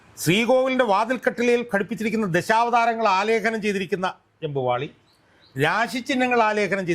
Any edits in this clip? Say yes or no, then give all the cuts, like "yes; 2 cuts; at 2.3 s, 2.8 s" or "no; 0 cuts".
no; 0 cuts